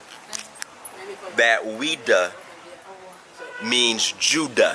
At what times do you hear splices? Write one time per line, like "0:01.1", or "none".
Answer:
none